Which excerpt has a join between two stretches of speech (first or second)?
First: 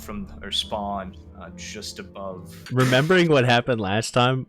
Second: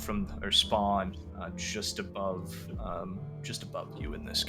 first